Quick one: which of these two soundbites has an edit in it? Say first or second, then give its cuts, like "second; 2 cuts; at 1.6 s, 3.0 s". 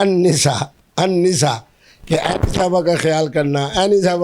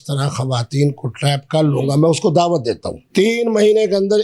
second; 1 cut; at 2.9 s